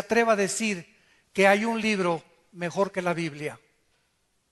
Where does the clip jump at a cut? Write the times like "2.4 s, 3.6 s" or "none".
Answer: 2.0 s